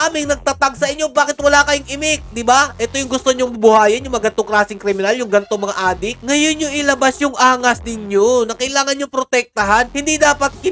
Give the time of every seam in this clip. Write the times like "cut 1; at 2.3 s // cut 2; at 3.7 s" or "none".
none